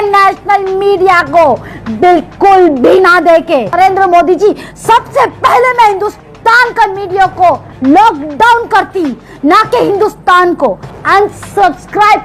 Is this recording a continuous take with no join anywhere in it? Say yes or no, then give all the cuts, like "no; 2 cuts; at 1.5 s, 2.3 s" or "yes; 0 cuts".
no; 2 cuts; at 3.7 s, 10.9 s